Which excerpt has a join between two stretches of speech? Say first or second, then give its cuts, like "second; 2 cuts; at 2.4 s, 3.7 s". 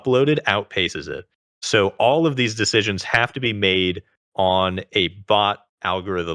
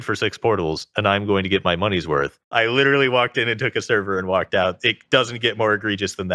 second; 1 cut; at 2.4 s